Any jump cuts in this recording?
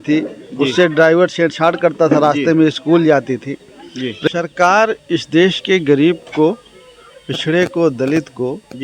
yes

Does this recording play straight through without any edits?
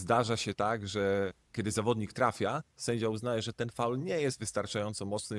yes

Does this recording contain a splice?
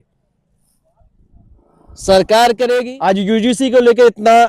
yes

